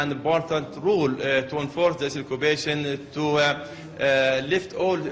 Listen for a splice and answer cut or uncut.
cut